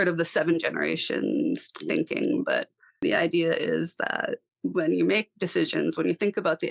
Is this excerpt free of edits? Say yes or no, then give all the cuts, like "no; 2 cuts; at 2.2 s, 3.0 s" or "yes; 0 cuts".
no; 1 cut; at 3.0 s